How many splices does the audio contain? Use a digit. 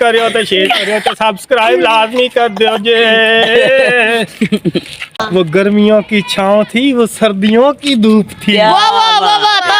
1